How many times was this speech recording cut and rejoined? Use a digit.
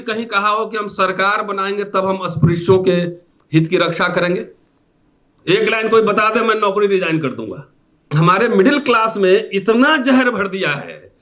1